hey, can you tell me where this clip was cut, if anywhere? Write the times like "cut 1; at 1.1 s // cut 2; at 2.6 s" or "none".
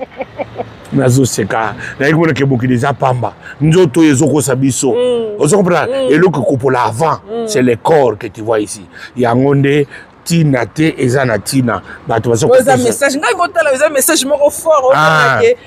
none